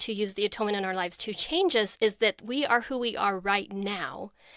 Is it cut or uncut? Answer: uncut